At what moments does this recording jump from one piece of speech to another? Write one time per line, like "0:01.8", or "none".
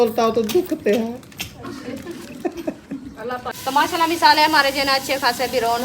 0:03.5